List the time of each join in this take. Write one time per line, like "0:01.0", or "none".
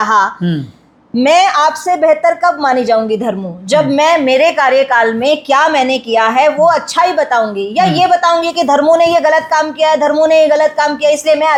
none